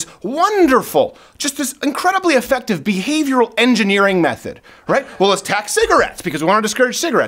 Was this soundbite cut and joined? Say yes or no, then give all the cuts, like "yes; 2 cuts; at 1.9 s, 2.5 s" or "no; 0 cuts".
no; 0 cuts